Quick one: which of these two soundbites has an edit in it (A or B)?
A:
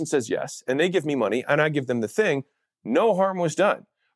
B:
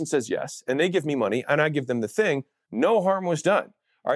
B